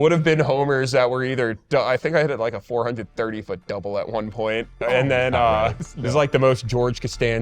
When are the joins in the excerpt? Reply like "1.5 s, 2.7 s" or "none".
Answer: 5.8 s